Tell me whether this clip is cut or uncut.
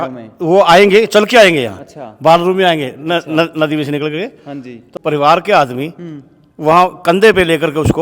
cut